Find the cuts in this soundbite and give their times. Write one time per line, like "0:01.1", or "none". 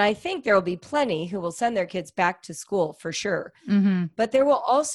none